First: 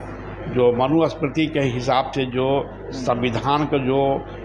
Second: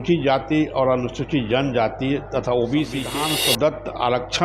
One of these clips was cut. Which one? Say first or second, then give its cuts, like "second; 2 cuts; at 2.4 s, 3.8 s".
second; 1 cut; at 3.1 s